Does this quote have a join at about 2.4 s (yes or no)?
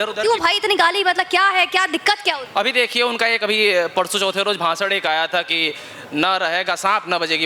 yes